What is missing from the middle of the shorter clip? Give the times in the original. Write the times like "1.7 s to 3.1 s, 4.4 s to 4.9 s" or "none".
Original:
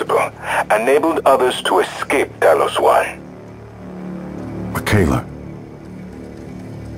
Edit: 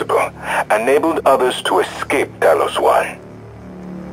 3.2 s to 3.3 s

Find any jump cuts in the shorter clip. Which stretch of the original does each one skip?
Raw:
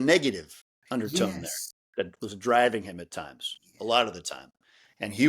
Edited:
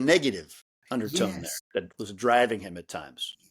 1.5 s to 1.7 s

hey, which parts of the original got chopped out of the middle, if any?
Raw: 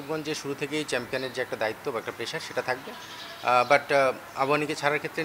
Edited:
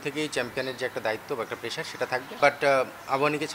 2.9 s to 3.7 s

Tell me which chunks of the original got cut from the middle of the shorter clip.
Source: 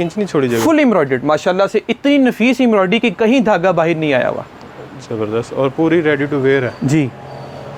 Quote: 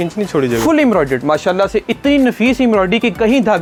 none

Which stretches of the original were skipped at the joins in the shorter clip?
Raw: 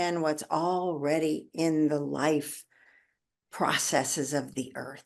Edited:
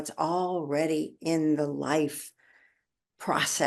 none

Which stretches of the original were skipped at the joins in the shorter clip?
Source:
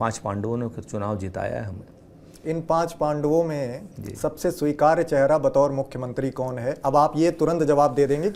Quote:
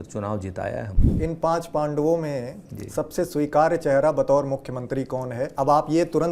1.8 s to 2.3 s

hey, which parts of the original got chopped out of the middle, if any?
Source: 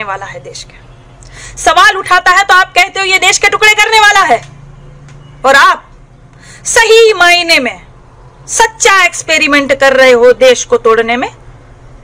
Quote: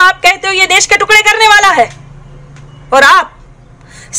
none

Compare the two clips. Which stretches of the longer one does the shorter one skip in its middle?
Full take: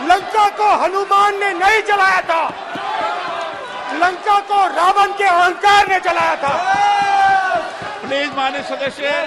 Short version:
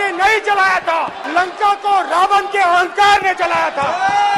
2.6 s to 3.9 s

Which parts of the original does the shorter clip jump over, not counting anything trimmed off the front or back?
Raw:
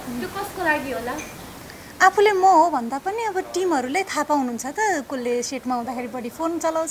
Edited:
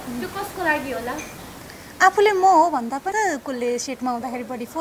3.1 s to 4.8 s

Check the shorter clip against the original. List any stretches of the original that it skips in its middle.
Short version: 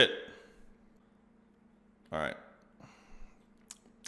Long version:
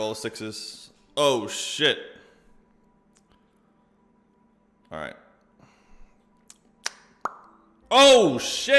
2.9 s to 3.8 s

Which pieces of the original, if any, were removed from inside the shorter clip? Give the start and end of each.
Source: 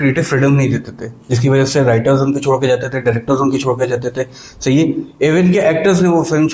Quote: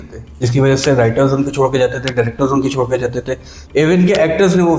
4.5 s to 5.1 s

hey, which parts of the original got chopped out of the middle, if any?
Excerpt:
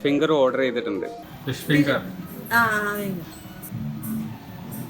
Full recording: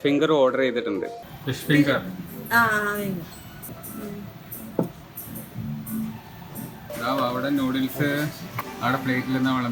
3.6 s to 5.5 s

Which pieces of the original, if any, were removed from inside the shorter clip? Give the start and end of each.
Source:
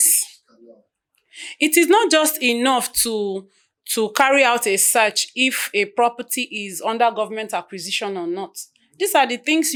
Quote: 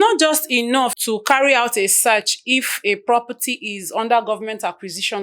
2.9 s to 3.9 s

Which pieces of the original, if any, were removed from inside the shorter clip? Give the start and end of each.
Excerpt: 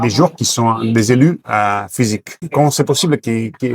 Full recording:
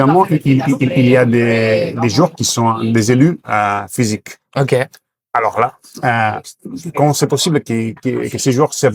4.3 s to 6.8 s

